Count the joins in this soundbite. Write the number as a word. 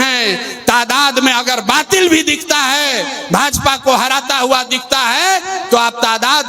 zero